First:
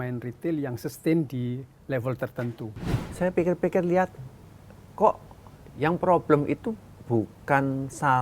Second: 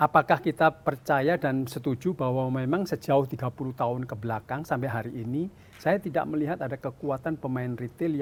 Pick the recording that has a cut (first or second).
first